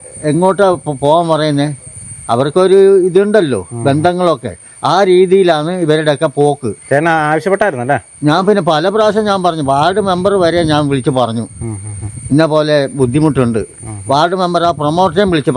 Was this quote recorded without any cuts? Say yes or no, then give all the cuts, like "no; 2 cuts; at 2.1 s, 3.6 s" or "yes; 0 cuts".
yes; 0 cuts